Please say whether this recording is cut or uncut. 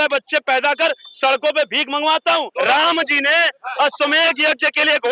cut